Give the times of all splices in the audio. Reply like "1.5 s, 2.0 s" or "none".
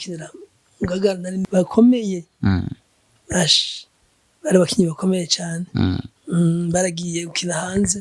1.4 s